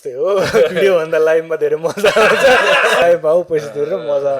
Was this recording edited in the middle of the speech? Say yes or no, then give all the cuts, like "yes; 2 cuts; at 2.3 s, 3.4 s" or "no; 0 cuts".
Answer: yes; 1 cut; at 3.0 s